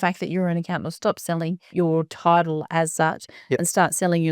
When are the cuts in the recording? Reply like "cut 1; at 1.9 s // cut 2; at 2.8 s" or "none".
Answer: cut 1; at 1.6 s